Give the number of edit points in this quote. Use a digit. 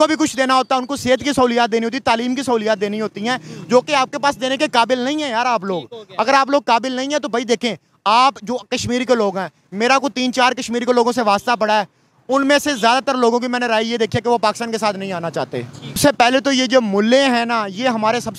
1